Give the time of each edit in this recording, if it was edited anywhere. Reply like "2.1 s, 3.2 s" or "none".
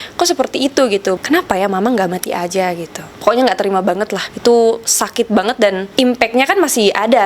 1.2 s, 3.0 s, 4.2 s, 5.8 s